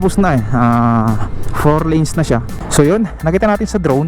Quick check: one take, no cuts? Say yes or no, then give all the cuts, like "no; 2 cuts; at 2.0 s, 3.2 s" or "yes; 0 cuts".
no; 1 cut; at 2.6 s